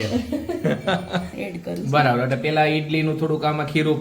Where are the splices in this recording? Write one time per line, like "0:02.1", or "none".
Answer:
0:01.3